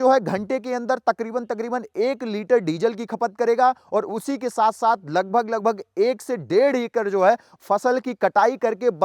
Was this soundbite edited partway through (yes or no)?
no